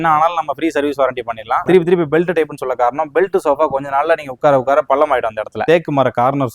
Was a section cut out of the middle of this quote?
yes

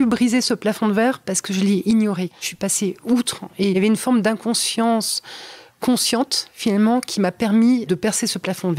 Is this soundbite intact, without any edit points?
no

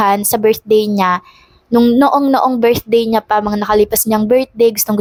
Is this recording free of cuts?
yes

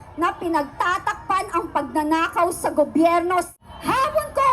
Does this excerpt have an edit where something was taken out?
yes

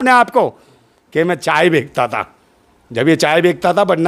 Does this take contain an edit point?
no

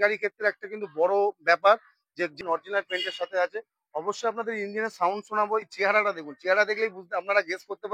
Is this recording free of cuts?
no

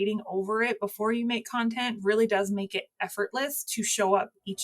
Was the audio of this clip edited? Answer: yes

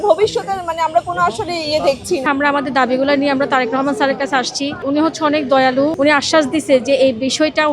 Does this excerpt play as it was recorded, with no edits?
no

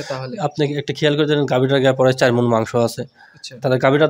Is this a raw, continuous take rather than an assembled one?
yes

